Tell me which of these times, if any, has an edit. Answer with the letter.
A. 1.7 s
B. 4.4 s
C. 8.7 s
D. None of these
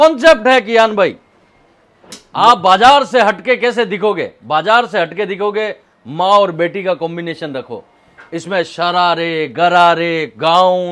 D